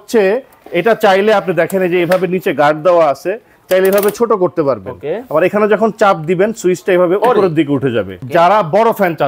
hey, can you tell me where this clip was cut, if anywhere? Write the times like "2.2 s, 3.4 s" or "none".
8.2 s